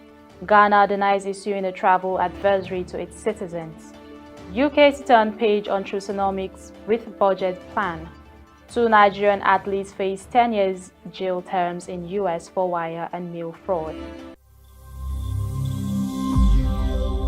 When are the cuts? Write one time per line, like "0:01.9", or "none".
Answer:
0:14.3